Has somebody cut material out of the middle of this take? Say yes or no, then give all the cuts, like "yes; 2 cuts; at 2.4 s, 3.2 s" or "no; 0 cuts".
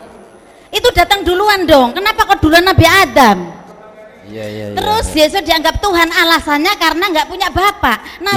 no; 0 cuts